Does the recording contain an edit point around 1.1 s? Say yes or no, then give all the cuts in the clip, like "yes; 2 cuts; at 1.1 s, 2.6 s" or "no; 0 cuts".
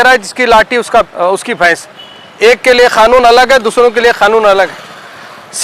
yes; 1 cut; at 1.1 s